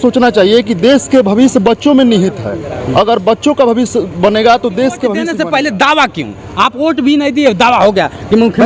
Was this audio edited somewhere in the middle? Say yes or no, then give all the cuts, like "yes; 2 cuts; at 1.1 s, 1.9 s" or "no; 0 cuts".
yes; 1 cut; at 5.2 s